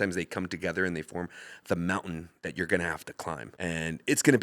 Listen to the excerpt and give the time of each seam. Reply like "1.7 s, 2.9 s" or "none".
3.5 s